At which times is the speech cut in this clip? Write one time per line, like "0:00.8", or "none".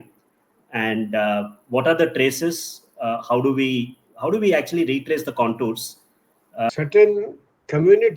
0:06.7